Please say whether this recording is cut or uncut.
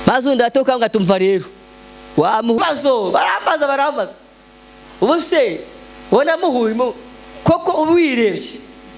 cut